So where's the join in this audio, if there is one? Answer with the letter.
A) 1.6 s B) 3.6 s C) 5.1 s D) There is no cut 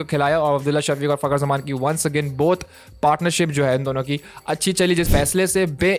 C